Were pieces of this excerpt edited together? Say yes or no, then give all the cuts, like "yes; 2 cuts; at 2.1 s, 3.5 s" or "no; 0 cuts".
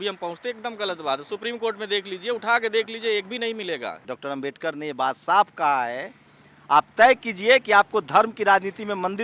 yes; 1 cut; at 4.0 s